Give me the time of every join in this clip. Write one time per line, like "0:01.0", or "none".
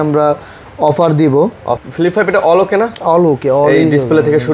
0:01.8